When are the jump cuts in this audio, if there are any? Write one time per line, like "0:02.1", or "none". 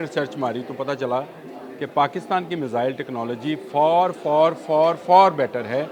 none